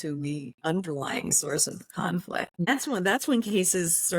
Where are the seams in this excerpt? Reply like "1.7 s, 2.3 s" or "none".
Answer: 2.7 s